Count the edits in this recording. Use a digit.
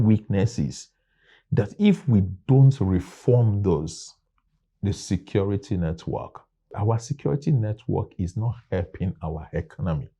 1